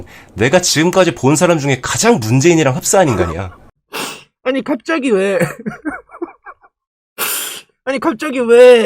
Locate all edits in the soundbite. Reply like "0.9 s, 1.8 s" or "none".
none